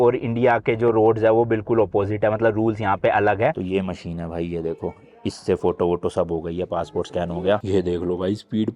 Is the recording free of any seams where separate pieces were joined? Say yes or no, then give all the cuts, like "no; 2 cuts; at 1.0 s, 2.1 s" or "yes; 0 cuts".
no; 2 cuts; at 3.5 s, 7.6 s